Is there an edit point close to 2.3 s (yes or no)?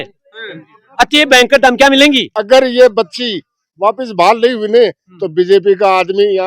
yes